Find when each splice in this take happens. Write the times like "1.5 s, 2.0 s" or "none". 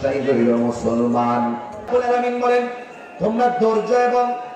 1.9 s